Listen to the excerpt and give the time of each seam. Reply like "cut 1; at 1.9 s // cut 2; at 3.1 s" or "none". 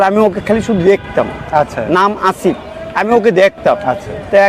none